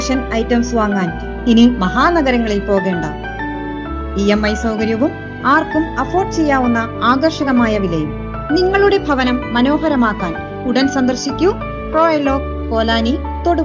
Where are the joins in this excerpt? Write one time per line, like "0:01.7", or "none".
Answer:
none

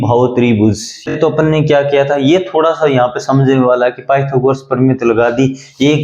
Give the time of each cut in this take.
0:01.1

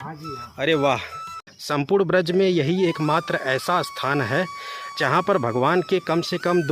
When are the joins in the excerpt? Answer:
0:01.6

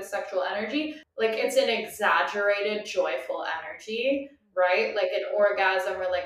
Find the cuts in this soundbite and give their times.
0:01.0

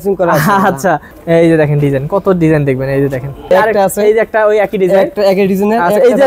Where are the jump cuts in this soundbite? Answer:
0:01.1
0:03.5

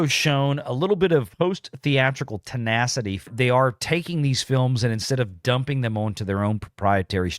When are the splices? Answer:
0:01.3
0:03.3

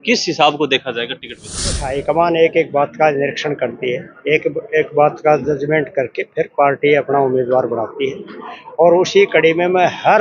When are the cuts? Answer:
0:01.9

